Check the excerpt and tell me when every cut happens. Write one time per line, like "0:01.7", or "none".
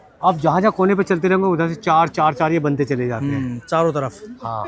none